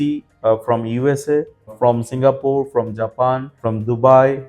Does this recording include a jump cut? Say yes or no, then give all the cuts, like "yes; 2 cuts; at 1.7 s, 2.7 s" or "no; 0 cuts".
yes; 1 cut; at 3.5 s